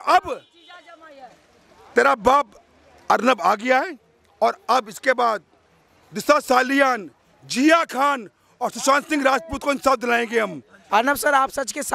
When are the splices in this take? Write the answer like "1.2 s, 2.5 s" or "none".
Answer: 10.8 s